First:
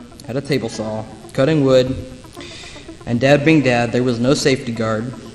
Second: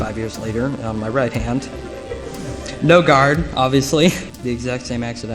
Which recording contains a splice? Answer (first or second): second